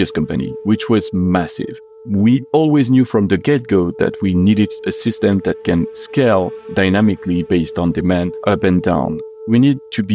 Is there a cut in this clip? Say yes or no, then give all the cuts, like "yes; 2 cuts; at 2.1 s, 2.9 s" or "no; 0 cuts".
yes; 3 cuts; at 1.9 s, 8.3 s, 9.2 s